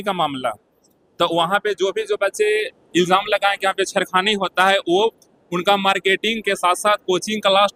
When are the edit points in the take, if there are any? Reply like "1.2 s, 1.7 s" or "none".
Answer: none